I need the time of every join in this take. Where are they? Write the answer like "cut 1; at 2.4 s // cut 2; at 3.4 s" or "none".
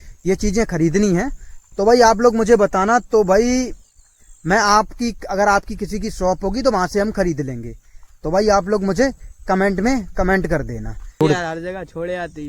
cut 1; at 11.2 s